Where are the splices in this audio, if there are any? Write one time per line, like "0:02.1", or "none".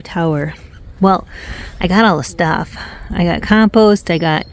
none